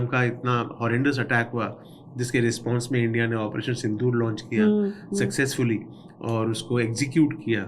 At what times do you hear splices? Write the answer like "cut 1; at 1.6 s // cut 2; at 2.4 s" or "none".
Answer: none